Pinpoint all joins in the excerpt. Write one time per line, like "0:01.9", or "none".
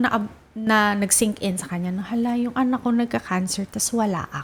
none